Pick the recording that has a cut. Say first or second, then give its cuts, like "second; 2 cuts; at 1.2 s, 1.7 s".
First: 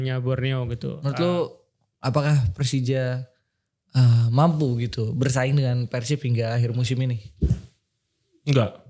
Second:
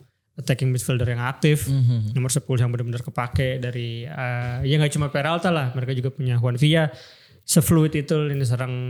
first; 1 cut; at 1.0 s